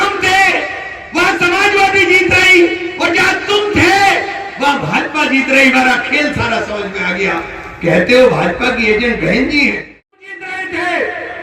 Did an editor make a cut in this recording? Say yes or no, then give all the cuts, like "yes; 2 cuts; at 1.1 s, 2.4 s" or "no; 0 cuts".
yes; 1 cut; at 10.0 s